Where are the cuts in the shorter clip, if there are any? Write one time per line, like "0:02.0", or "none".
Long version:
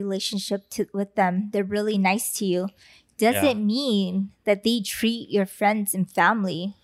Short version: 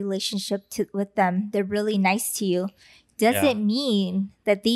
none